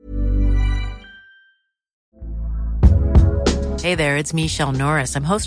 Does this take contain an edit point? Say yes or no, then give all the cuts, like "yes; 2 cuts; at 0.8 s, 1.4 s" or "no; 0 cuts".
yes; 1 cut; at 2.0 s